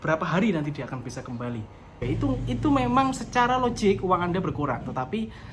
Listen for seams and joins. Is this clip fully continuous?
no; 1 cut; at 2.0 s

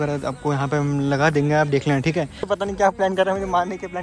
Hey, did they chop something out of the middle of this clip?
yes; 1 cut; at 2.5 s

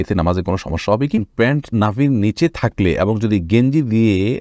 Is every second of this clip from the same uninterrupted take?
no; 1 cut; at 1.2 s

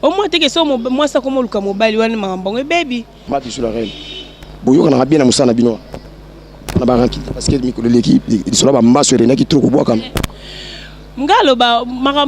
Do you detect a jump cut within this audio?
yes; 1 cut; at 3.2 s

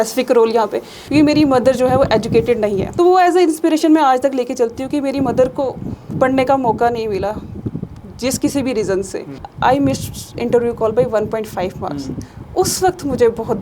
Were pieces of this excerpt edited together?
yes; 3 cuts; at 0.9 s, 2.8 s, 9.5 s

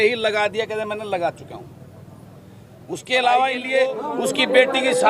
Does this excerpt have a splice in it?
yes; 1 cut; at 3.7 s

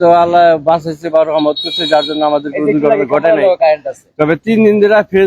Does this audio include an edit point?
no; 0 cuts

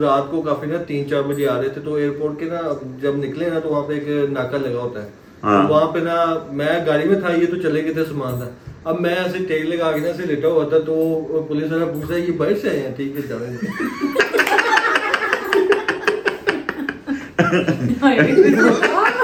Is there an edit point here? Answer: no; 0 cuts

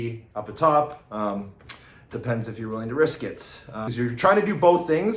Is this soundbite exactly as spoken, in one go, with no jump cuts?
no; 1 cut; at 3.8 s

